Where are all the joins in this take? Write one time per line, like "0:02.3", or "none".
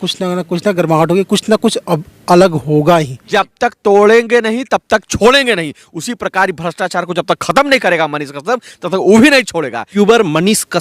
0:03.2
0:09.9